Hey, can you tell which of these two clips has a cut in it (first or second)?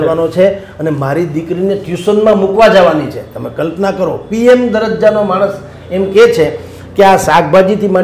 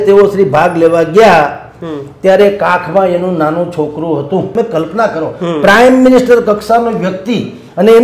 second